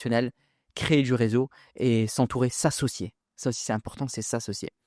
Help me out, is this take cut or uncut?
uncut